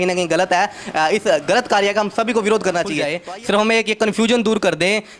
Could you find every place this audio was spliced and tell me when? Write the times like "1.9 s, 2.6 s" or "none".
3.1 s

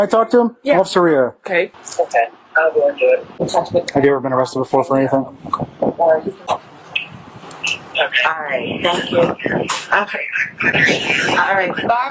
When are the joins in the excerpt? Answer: 1.8 s

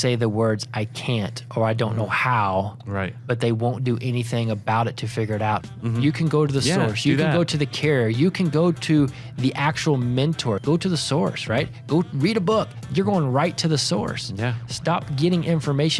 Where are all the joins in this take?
5.6 s, 10.6 s

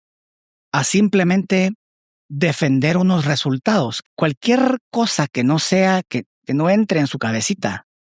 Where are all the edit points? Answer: 4.0 s

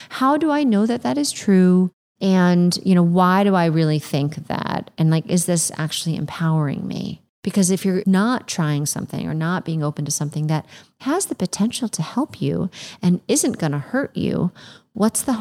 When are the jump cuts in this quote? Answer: 2.0 s, 7.8 s

